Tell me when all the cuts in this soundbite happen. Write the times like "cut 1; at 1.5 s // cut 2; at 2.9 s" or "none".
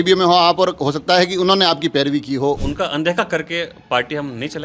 cut 1; at 2.6 s